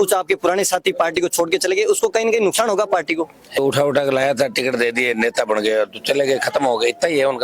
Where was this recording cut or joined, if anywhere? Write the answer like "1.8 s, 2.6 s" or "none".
3.6 s